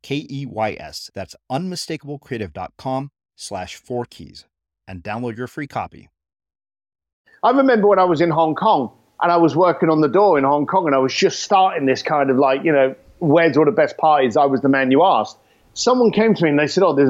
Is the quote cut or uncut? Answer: cut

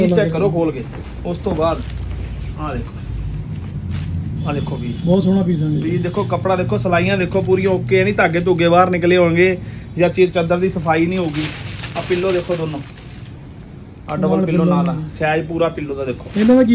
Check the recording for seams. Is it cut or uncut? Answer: uncut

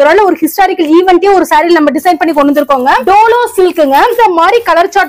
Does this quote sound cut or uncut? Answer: cut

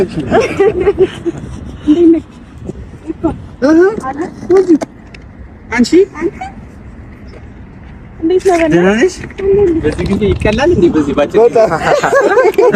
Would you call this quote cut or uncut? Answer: uncut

